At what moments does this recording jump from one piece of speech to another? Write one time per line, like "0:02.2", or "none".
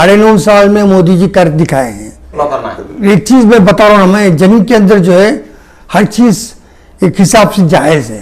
0:02.4